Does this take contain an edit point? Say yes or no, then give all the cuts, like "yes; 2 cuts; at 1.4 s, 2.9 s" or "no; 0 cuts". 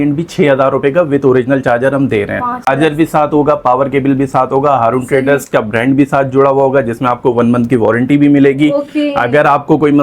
yes; 1 cut; at 2.7 s